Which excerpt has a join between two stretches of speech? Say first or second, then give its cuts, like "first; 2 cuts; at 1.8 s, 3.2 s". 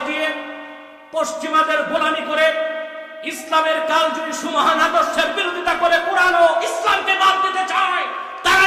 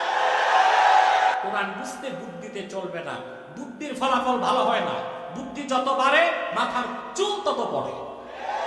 second; 2 cuts; at 1.4 s, 7.0 s